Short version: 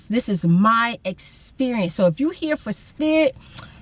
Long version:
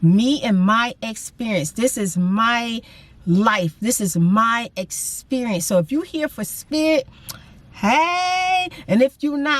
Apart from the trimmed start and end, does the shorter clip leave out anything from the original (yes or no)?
no